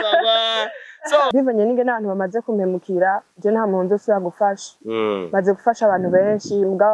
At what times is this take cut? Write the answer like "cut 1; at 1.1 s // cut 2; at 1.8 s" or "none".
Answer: cut 1; at 1.3 s

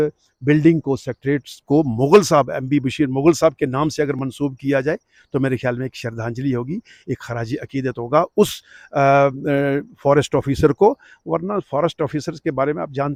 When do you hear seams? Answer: none

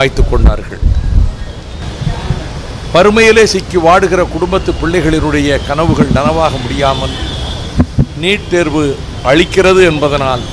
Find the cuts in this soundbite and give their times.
cut 1; at 1.8 s

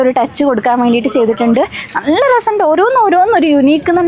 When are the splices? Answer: none

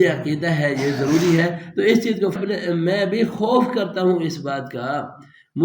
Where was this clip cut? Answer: cut 1; at 2.4 s

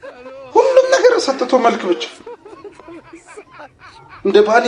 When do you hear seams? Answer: none

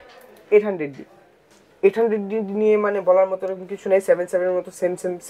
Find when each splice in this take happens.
none

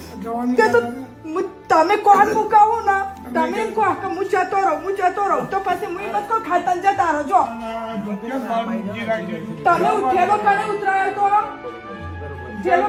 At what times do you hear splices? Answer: none

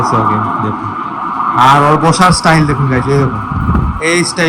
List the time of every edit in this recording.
none

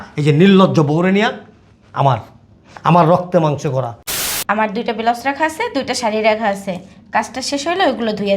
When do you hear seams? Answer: cut 1; at 4.2 s

